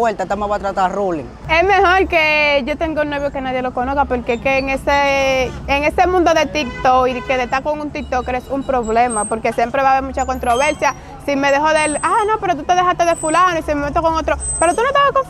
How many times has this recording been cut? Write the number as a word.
one